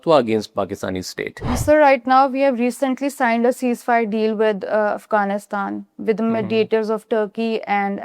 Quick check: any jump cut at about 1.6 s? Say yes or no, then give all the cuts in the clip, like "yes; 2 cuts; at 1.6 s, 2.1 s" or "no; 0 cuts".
yes; 1 cut; at 1.6 s